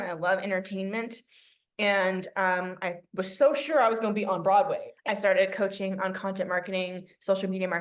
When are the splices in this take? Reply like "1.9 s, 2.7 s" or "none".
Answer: 4.9 s